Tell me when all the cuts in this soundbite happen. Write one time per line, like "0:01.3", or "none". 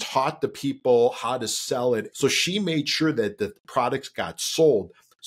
0:02.1